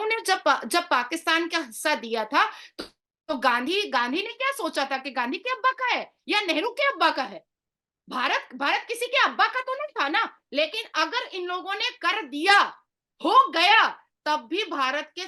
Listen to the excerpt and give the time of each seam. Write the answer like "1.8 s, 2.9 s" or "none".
none